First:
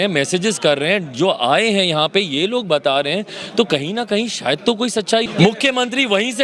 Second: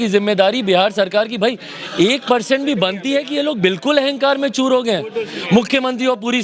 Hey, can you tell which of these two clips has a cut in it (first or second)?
first